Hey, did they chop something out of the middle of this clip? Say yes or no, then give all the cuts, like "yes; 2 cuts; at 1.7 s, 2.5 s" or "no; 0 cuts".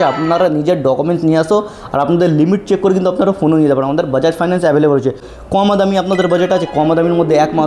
yes; 1 cut; at 5.3 s